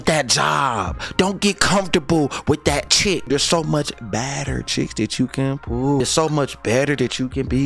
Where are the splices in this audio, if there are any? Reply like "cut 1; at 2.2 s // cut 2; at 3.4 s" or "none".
cut 1; at 3.3 s // cut 2; at 6.0 s